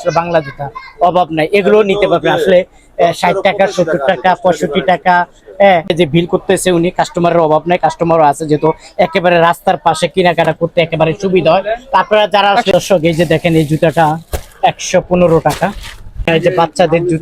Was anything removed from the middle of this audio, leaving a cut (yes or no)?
yes